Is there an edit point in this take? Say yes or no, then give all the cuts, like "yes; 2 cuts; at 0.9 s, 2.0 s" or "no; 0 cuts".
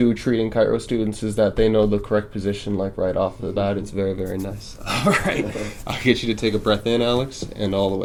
no; 0 cuts